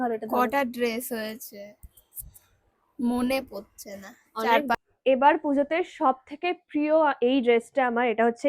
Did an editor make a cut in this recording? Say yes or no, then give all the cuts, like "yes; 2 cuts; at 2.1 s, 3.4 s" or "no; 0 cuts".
yes; 1 cut; at 4.7 s